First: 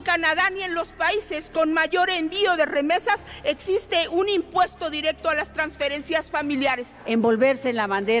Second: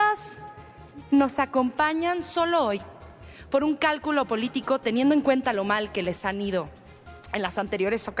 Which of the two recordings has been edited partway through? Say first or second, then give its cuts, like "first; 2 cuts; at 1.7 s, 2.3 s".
first; 1 cut; at 6.9 s